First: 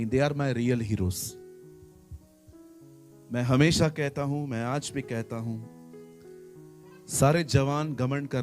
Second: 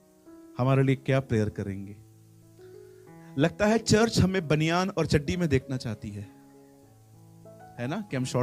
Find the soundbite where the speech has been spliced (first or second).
first